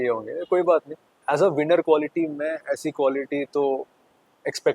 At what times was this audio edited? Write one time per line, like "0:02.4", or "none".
0:01.2